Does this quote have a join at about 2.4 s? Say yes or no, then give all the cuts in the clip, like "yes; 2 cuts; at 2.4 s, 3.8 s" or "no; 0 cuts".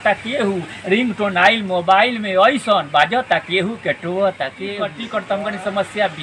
no; 1 cut; at 5.1 s